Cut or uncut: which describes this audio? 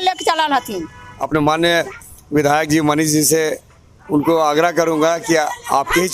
cut